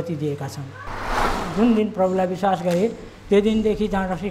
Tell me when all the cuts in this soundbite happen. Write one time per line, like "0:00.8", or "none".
0:01.4